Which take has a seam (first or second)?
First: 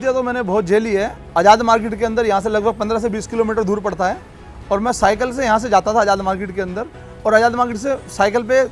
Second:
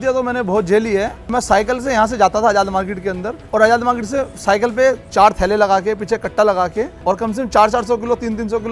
second